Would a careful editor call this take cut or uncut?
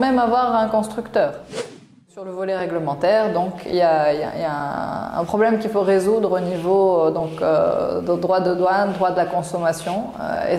cut